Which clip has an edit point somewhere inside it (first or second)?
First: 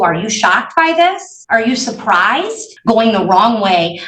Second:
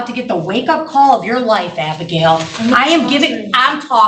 first